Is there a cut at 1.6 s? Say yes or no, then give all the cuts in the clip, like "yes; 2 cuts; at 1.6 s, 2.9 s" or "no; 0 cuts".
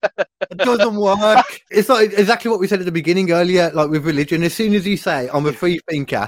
yes; 1 cut; at 1.6 s